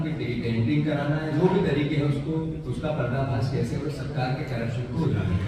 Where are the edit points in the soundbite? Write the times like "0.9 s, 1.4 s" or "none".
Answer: none

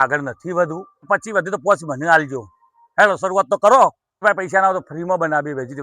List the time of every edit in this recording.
1.1 s, 4.2 s

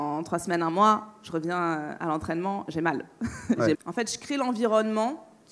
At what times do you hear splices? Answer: 3.7 s

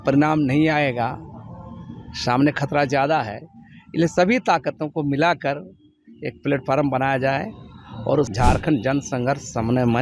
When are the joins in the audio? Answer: 8.3 s

